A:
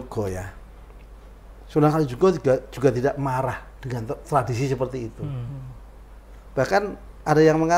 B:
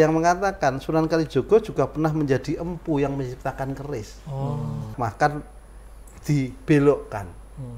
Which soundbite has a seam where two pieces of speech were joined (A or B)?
B